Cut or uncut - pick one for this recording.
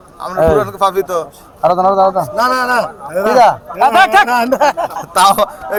uncut